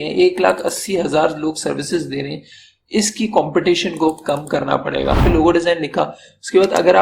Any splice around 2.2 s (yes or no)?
no